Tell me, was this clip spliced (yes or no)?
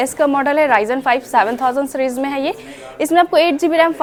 no